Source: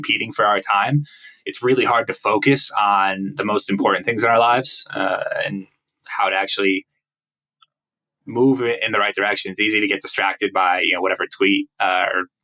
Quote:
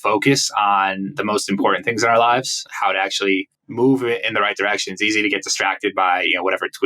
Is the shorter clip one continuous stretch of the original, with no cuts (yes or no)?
no